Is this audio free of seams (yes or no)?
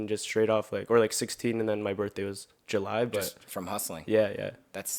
yes